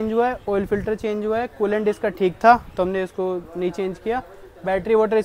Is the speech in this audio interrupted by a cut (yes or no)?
no